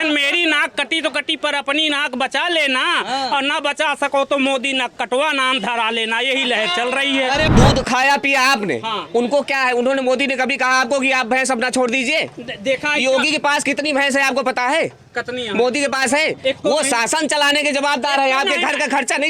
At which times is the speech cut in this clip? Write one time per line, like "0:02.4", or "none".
0:07.5